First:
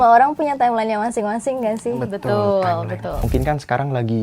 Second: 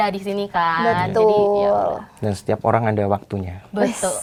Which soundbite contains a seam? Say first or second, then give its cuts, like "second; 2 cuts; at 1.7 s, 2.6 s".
first; 1 cut; at 3.2 s